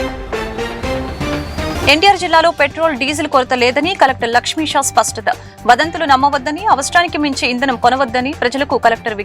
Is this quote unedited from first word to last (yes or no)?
no